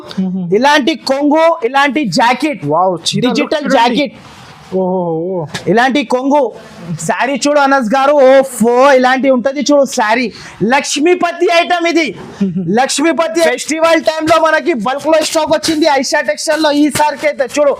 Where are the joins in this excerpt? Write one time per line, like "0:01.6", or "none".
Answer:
0:13.4